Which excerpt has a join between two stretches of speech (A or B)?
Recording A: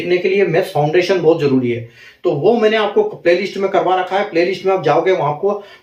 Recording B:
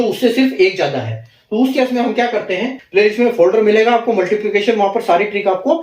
B